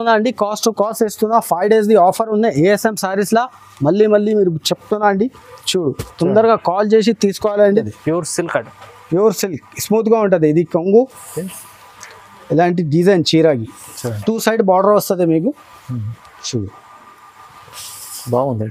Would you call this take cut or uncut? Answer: cut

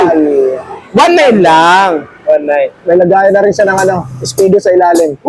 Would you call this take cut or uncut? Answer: uncut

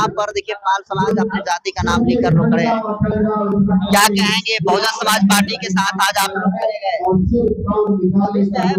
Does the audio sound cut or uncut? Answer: uncut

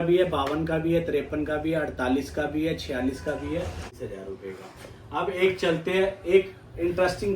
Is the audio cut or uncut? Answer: cut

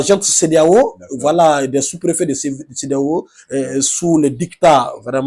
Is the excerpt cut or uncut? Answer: uncut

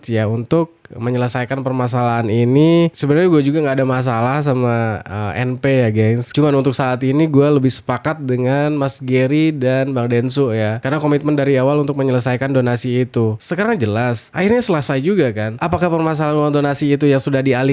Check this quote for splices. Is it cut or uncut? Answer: uncut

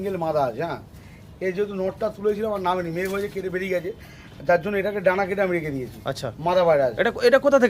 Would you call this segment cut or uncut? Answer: uncut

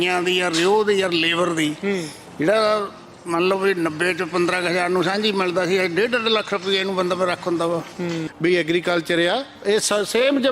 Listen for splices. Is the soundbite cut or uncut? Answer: cut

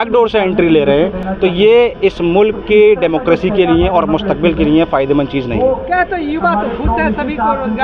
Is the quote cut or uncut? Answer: uncut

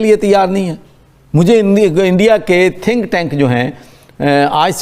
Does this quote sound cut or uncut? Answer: uncut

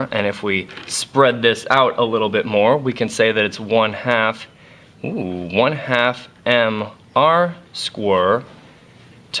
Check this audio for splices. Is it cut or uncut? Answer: uncut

